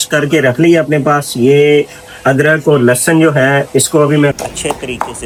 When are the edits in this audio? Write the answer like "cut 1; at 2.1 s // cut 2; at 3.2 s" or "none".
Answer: none